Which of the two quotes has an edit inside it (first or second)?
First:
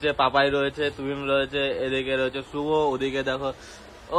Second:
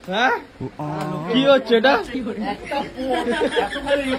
second